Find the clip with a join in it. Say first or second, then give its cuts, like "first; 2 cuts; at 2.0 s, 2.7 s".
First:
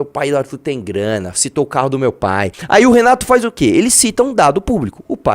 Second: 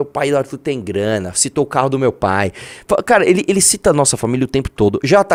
first; 1 cut; at 2.6 s